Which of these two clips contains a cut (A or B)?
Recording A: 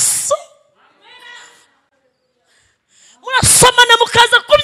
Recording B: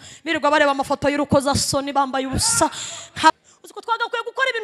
B